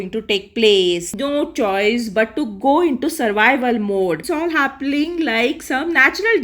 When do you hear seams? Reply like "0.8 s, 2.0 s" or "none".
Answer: 1.2 s, 4.3 s